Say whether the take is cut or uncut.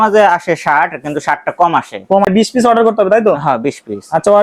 cut